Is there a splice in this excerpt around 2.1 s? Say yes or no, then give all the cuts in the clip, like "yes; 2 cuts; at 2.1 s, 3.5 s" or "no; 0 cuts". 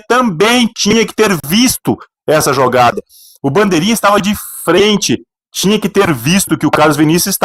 no; 0 cuts